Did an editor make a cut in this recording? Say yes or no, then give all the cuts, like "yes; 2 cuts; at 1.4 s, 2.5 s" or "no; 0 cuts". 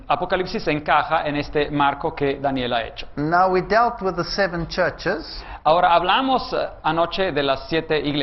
no; 0 cuts